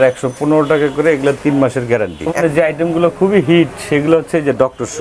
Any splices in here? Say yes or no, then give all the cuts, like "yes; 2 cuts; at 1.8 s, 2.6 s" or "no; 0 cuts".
yes; 1 cut; at 2.4 s